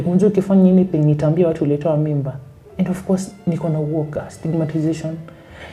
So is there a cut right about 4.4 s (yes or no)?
no